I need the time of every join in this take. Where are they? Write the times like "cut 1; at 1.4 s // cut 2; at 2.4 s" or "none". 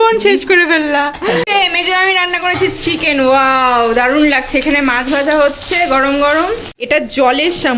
cut 1; at 1.5 s // cut 2; at 6.7 s